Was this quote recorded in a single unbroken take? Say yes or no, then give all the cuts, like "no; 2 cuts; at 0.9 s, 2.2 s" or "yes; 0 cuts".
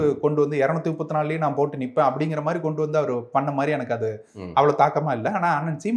yes; 0 cuts